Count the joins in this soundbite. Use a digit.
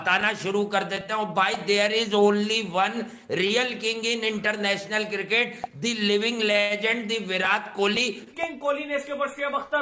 1